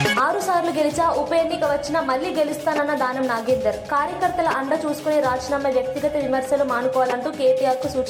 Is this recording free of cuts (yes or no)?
yes